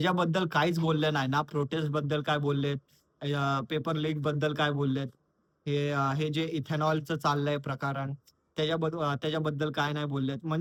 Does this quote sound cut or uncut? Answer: uncut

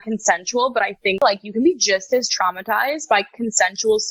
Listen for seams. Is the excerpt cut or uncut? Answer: cut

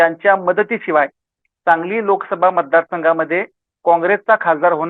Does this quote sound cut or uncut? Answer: uncut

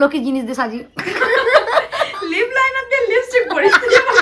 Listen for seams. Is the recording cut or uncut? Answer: uncut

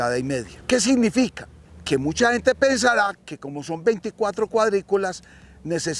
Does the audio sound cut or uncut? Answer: uncut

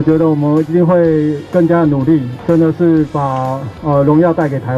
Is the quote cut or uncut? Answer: cut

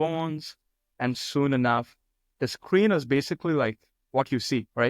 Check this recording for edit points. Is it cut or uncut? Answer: uncut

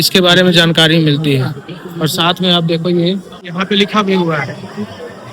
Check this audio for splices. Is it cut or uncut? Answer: cut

